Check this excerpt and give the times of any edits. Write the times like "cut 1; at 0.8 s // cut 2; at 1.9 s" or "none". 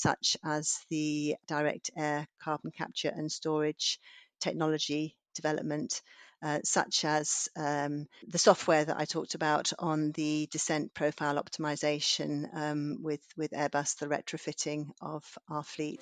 cut 1; at 1.4 s // cut 2; at 8.2 s